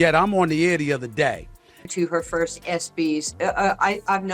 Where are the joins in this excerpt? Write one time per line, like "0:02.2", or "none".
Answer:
0:01.9